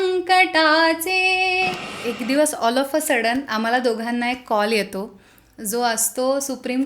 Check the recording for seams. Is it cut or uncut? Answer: cut